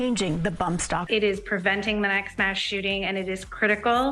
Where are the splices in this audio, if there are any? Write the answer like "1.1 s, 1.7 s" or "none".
1.1 s